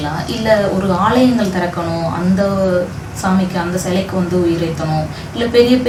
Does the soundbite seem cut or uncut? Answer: uncut